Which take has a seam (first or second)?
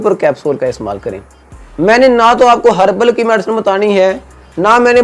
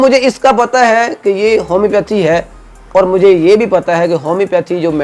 first